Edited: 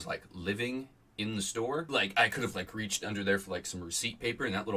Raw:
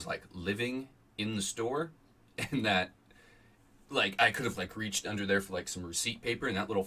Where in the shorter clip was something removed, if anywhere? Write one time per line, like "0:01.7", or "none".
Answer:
0:01.5